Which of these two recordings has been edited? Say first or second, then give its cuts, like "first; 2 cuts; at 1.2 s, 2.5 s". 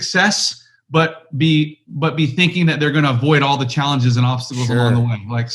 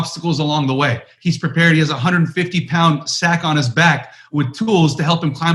second; 1 cut; at 1.1 s